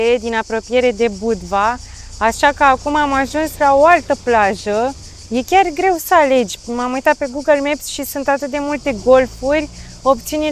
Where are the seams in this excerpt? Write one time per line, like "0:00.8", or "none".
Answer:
none